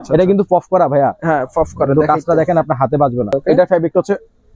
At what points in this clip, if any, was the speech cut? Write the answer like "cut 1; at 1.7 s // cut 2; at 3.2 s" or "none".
cut 1; at 3.3 s